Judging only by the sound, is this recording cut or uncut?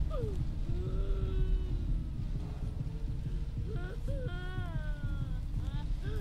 uncut